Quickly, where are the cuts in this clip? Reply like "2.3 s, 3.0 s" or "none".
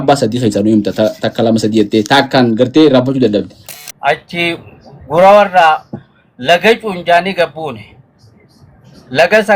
3.6 s